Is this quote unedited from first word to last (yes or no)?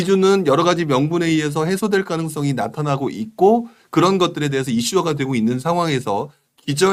yes